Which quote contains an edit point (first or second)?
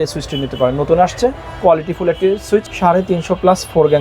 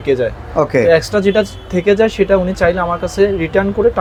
first